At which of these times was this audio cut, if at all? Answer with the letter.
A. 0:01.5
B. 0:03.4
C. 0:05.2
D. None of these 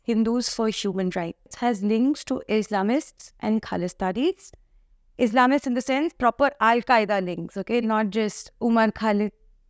A